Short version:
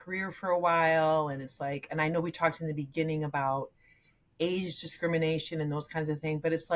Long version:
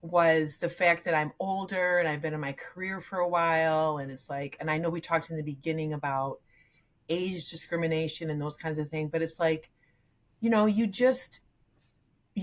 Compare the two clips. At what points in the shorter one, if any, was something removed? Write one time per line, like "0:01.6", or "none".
none